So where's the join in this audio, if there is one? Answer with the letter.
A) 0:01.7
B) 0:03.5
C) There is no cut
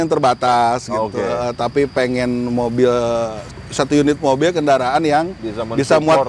B